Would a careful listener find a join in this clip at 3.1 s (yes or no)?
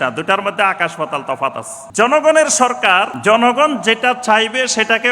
yes